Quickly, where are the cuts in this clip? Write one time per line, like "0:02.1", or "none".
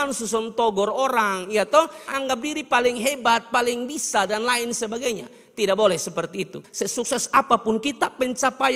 0:06.6